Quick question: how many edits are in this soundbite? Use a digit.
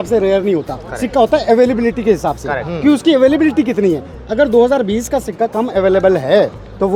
0